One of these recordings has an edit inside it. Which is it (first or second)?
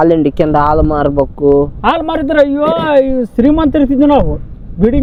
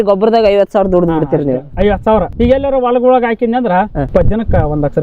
second